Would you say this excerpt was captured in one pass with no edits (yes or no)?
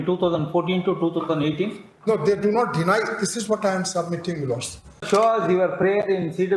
no